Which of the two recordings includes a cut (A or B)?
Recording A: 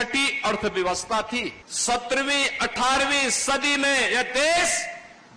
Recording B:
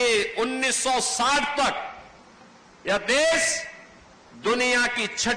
A